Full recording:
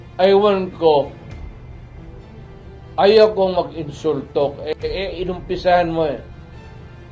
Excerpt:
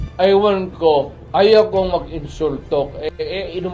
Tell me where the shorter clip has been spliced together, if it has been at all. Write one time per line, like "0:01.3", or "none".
0:01.2